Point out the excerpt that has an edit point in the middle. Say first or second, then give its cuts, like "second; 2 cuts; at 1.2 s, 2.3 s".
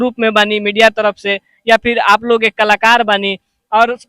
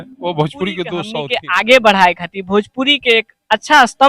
second; 1 cut; at 1.1 s